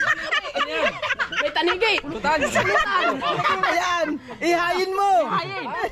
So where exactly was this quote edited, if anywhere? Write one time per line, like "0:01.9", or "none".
0:03.4